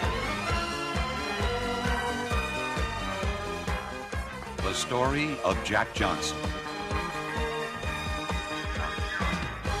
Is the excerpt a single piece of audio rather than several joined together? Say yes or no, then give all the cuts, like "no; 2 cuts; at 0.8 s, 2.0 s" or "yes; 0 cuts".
no; 1 cut; at 7.2 s